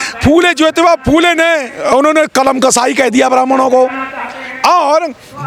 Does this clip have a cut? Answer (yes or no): no